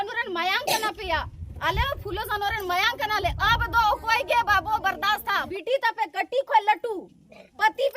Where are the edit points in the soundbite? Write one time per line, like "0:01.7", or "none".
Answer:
0:05.4